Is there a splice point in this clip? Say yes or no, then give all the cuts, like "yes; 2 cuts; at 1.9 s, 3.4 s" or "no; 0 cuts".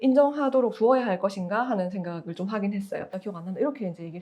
yes; 1 cut; at 3.2 s